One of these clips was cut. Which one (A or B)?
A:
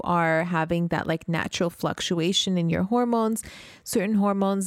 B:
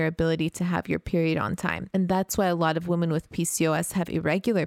B